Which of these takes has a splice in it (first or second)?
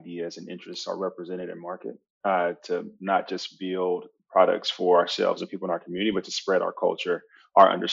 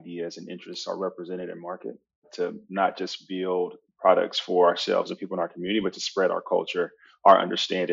second